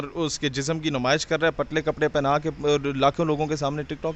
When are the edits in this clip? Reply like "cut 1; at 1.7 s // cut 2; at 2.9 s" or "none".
none